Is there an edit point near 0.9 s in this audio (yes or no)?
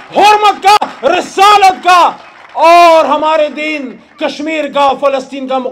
no